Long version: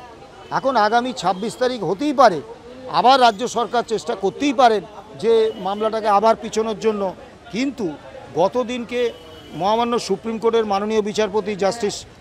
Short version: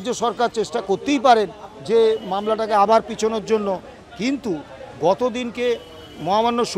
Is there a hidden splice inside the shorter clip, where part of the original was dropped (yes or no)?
no